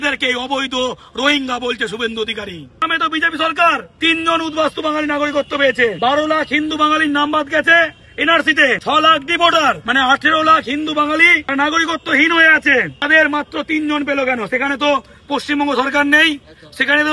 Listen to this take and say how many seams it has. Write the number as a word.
seven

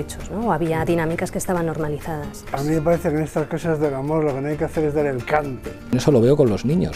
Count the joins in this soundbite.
two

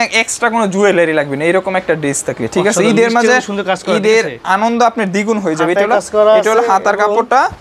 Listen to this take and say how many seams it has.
zero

